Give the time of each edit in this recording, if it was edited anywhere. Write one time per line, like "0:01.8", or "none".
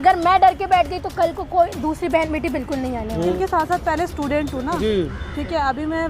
0:03.3